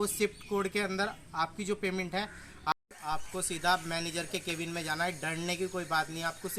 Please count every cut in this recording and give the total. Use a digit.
1